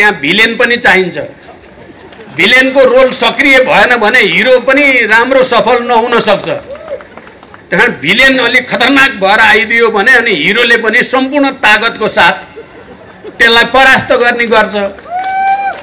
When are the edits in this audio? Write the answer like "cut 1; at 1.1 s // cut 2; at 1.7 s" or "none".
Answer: none